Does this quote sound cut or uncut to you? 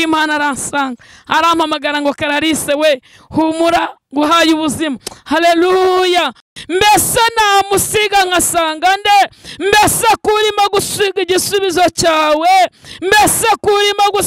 cut